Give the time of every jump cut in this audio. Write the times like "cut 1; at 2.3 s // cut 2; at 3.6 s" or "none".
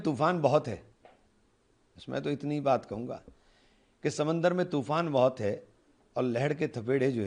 none